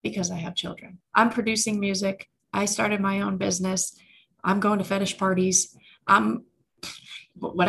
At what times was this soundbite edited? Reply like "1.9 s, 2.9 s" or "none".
0.9 s